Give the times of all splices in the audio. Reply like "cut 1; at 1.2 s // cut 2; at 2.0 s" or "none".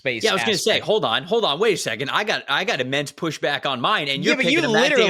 none